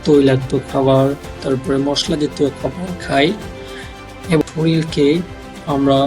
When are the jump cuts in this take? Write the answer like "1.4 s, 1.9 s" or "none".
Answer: 4.4 s